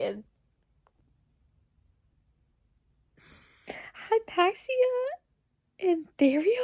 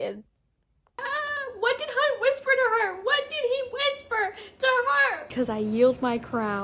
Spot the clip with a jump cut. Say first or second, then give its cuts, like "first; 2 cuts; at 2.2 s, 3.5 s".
second; 2 cuts; at 0.9 s, 5.3 s